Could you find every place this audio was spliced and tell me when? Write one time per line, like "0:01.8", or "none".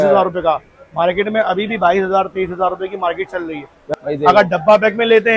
0:03.8